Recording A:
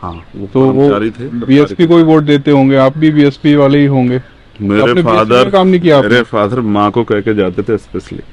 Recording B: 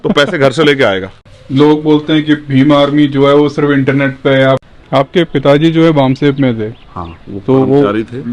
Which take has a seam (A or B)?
B